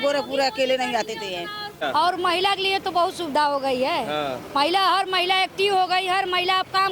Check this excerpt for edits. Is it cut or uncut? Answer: cut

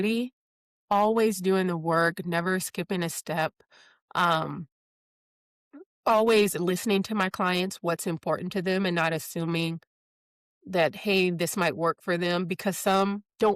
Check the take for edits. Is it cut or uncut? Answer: uncut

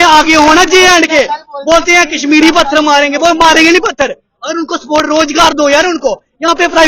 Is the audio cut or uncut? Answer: uncut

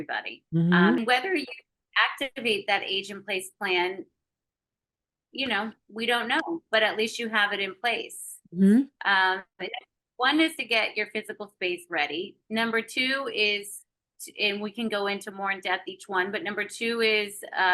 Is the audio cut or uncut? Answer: cut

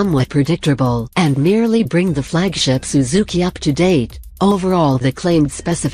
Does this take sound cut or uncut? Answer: uncut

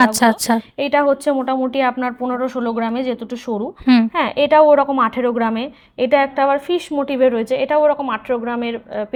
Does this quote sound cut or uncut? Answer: uncut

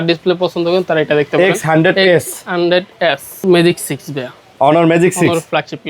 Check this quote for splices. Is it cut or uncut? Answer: cut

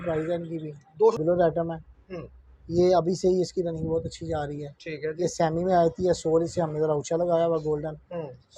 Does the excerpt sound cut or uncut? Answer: cut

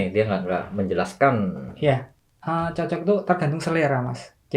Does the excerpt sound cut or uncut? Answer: uncut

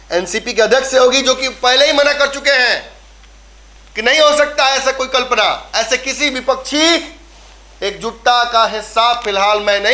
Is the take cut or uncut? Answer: uncut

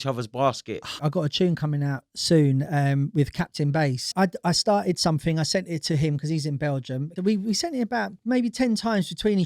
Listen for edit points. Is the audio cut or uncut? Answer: cut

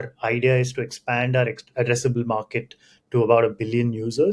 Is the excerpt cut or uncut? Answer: uncut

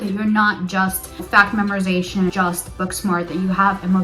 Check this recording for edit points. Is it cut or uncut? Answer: cut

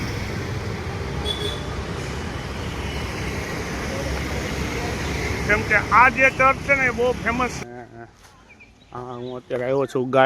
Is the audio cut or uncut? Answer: cut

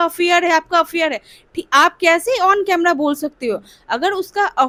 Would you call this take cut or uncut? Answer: uncut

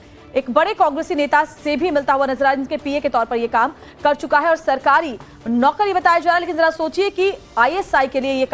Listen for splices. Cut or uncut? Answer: cut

